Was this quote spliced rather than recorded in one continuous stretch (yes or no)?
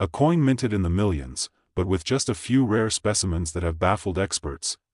no